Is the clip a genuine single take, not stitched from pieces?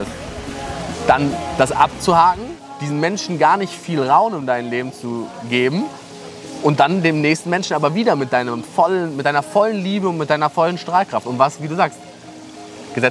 yes; 0 cuts

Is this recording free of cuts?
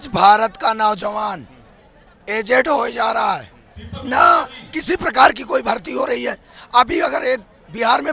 yes; 0 cuts

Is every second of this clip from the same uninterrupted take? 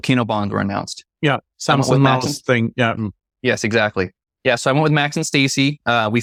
yes; 0 cuts

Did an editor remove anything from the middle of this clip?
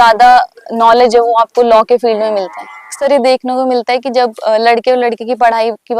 yes; 1 cut; at 2.9 s

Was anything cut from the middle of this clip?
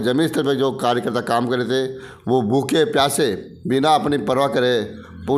no; 0 cuts

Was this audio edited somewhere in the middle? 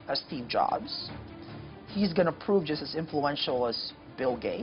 no; 0 cuts

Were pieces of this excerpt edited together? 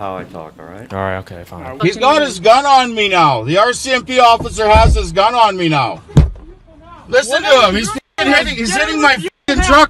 yes; 1 cut; at 1.7 s

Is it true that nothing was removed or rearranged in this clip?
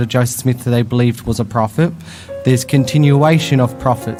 yes; 0 cuts

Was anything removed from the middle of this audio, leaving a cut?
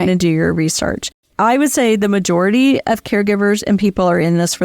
yes; 1 cut; at 1.3 s

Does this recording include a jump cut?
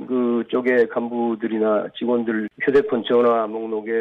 yes; 1 cut; at 2.5 s

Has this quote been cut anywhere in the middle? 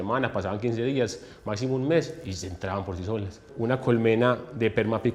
yes; 1 cut; at 3.4 s

